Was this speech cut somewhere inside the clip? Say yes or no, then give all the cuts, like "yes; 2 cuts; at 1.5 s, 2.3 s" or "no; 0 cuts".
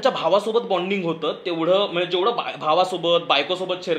no; 0 cuts